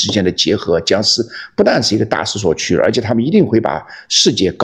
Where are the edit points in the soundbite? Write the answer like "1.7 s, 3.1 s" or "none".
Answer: none